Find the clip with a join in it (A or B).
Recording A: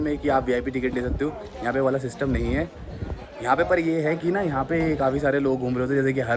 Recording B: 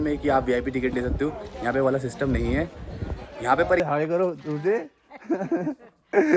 B